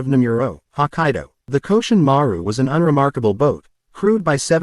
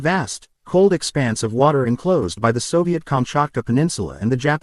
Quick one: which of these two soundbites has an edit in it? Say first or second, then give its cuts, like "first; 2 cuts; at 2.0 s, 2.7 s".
first; 1 cut; at 1.3 s